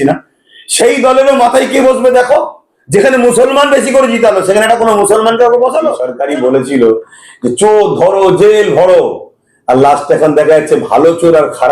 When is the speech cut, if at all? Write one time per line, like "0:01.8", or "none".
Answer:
0:06.1